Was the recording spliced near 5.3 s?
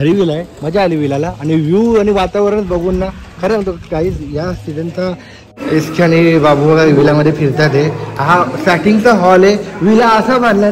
yes; 1 cut; at 5.3 s

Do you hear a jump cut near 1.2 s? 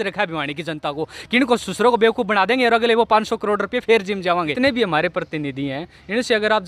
no; 1 cut; at 4.5 s

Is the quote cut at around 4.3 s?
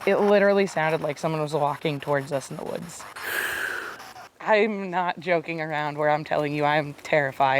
yes; 1 cut; at 4.3 s

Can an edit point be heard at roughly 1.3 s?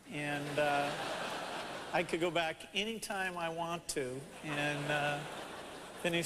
yes; 1 cut; at 1.3 s

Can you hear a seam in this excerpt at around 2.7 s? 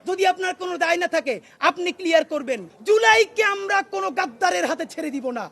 yes; 1 cut; at 2.7 s

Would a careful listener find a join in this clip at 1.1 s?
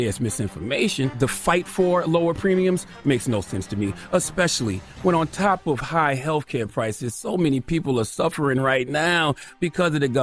yes; 1 cut; at 1.1 s

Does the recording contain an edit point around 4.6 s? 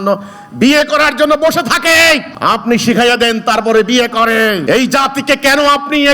yes; 2 cuts; at 2.3 s, 4.6 s

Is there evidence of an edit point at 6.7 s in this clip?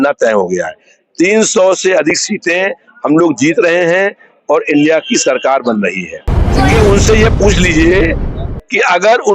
yes; 1 cut; at 6.7 s

